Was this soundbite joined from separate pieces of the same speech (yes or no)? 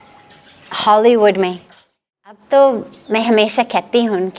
yes